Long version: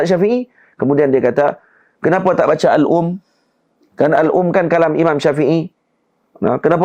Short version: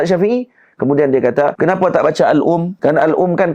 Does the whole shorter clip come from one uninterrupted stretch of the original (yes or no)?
no